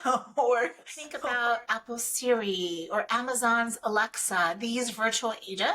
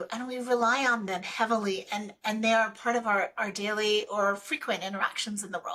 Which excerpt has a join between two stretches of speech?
first; 1 cut; at 1.2 s

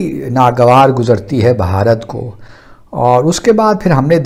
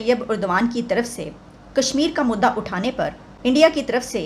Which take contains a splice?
second; 1 cut; at 3.2 s

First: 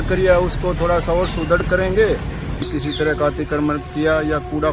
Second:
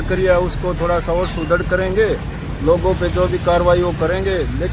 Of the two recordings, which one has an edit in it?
first; 1 cut; at 2.6 s

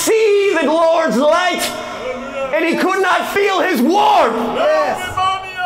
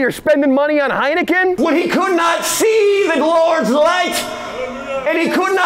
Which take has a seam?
second; 1 cut; at 1.6 s

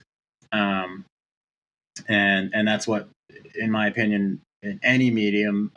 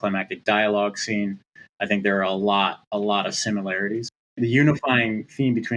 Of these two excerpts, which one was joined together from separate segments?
second; 1 cut; at 4.3 s

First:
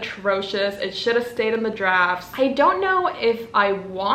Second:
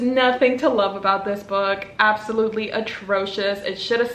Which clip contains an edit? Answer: first; 1 cut; at 2.2 s

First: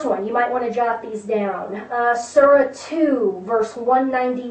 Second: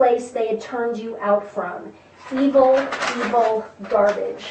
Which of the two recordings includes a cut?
first; 1 cut; at 2.4 s

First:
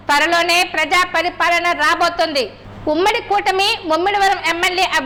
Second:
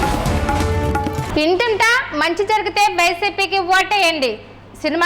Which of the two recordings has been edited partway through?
second; 1 cut; at 1.2 s

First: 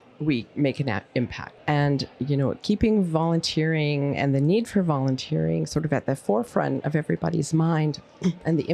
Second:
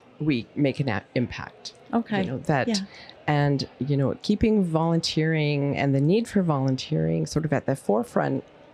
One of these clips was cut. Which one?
first; 2 cuts; at 1.5 s, 6.8 s

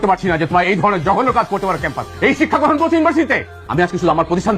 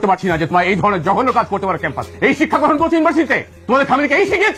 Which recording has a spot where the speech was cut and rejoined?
first; 1 cut; at 3.5 s

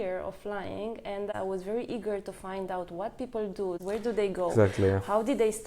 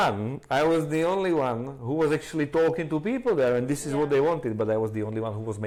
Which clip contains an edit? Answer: first; 2 cuts; at 1.3 s, 3.8 s

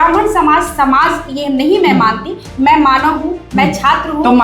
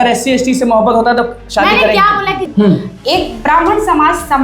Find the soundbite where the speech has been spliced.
second; 1 cut; at 2.5 s

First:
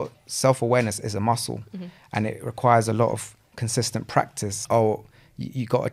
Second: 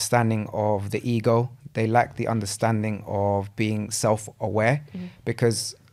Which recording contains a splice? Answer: first; 1 cut; at 4.5 s

